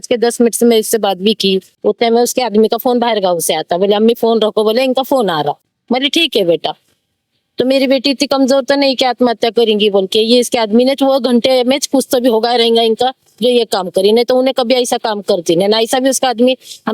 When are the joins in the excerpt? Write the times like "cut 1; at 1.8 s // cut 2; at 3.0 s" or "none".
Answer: cut 1; at 1.7 s